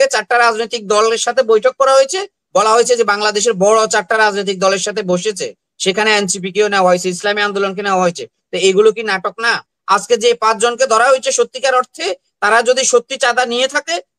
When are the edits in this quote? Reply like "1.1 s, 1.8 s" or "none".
9.7 s